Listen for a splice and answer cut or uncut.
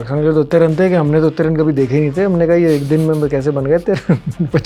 uncut